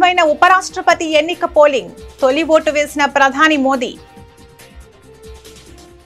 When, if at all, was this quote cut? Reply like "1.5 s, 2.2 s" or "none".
4.5 s